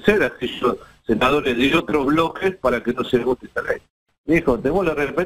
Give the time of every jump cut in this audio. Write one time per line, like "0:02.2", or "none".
0:04.0